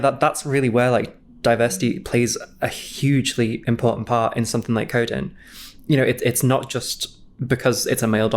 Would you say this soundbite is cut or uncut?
cut